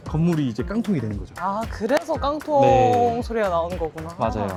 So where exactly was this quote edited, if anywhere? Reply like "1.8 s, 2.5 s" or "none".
none

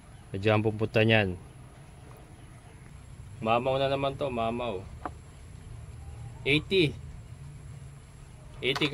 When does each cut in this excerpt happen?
2.5 s

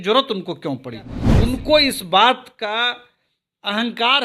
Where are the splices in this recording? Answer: 1.2 s

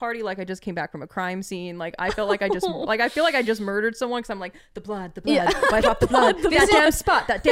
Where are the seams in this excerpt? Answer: none

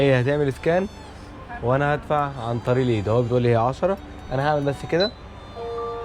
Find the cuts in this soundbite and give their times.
none

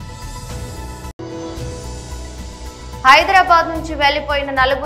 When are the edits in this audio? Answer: 2.7 s

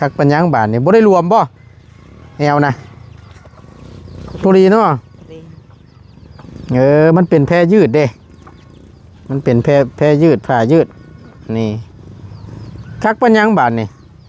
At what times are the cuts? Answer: none

